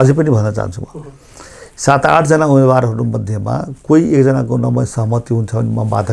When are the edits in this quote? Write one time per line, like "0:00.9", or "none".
none

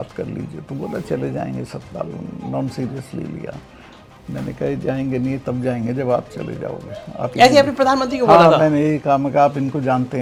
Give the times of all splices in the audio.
none

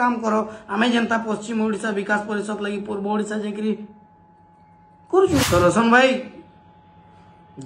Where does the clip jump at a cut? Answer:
0:05.4

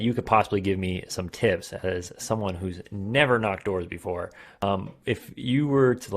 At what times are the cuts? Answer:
0:04.6

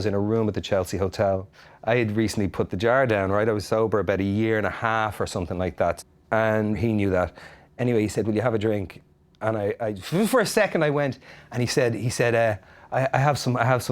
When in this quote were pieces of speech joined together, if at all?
0:06.8

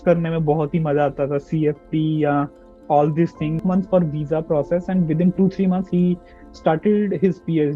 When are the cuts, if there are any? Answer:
0:03.6

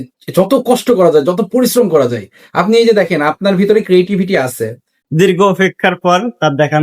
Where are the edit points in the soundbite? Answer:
0:05.0

